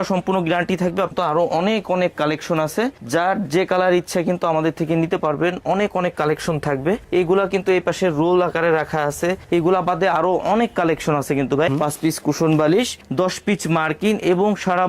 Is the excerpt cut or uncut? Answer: cut